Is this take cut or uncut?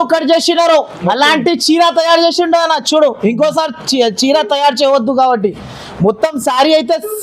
uncut